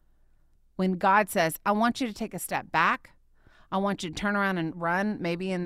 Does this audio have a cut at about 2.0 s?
no; 1 cut; at 4.8 s

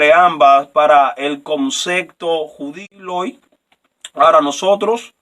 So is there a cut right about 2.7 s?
yes; 1 cut; at 2.7 s

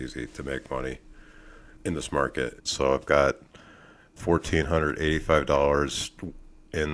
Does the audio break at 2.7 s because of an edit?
yes; 1 cut; at 2.7 s

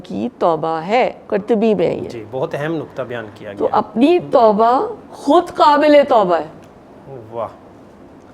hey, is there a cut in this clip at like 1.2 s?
no; 0 cuts

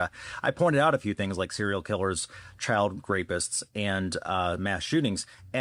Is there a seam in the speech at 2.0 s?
no; 0 cuts

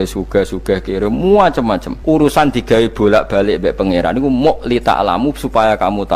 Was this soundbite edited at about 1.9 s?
yes; 1 cut; at 1.9 s

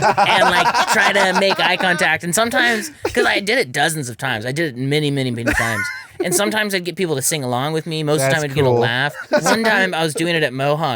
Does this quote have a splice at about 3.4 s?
no; 1 cut; at 9.1 s

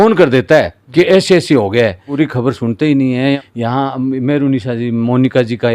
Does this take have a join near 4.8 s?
no; 2 cuts; at 2.0 s, 3.4 s

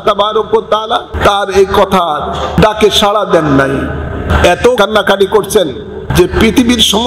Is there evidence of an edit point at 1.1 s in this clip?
yes; 4 cuts; at 1.1 s, 2.5 s, 4.6 s, 6.0 s

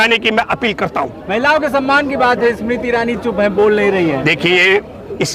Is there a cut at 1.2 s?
no; 0 cuts

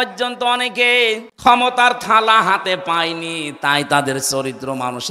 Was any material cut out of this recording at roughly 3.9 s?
no; 1 cut; at 1.3 s

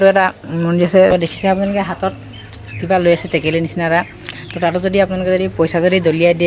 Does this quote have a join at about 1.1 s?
yes; 1 cut; at 1.1 s

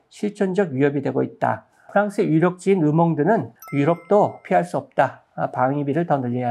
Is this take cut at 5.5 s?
no; 2 cuts; at 1.9 s, 3.5 s

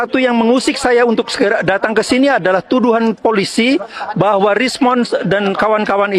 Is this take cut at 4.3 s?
no; 0 cuts

